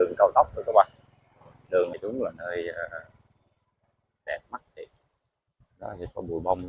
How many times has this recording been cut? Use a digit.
1